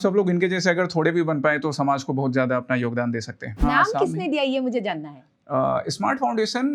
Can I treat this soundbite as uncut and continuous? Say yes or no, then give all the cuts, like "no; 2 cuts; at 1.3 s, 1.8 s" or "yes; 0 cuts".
no; 1 cut; at 3.6 s